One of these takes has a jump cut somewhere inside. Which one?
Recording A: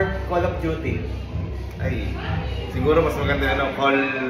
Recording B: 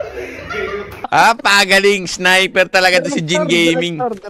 B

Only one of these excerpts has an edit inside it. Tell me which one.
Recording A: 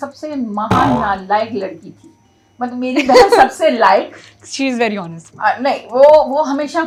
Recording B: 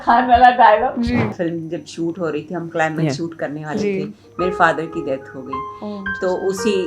B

